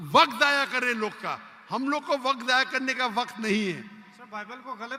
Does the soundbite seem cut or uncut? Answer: uncut